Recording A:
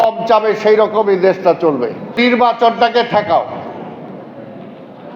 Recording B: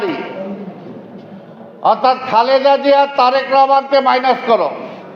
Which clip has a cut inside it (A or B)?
A